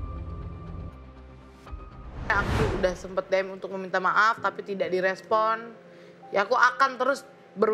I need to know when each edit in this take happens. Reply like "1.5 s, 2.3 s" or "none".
2.3 s

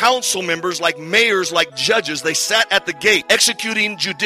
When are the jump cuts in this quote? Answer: 3.2 s

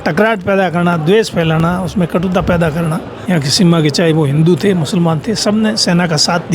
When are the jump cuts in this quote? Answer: 3.1 s

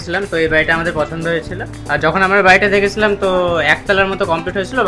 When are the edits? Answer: none

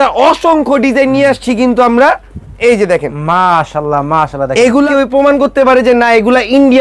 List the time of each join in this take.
4.9 s

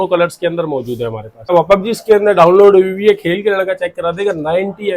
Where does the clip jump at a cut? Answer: 1.5 s

